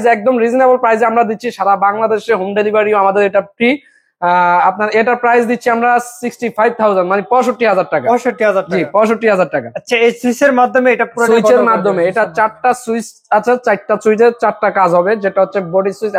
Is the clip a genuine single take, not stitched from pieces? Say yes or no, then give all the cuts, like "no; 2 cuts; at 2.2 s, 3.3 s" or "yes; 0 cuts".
yes; 0 cuts